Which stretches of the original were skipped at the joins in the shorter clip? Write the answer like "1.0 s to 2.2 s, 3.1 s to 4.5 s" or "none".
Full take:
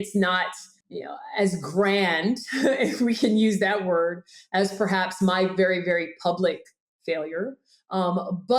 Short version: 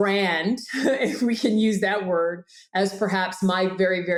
none